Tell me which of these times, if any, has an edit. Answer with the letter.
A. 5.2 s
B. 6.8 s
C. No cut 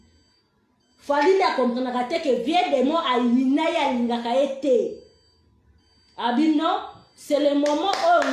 C